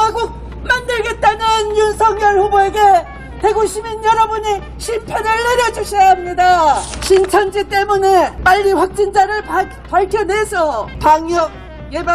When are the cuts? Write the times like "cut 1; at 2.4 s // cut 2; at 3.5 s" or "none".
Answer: cut 1; at 6.9 s // cut 2; at 8.4 s // cut 3; at 10.9 s